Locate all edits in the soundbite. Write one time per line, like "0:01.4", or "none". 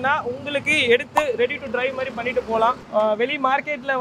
0:02.8